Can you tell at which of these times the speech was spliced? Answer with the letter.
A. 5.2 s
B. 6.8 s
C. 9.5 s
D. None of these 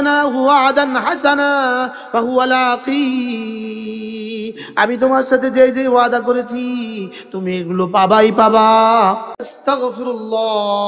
C